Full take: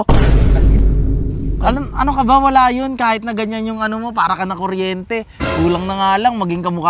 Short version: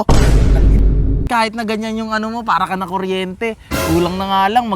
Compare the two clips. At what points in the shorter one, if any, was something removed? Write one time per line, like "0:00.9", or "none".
0:01.3